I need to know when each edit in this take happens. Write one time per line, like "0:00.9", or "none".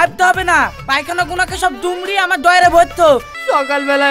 0:03.1